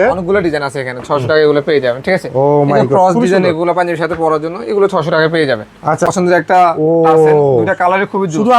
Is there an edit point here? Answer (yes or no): yes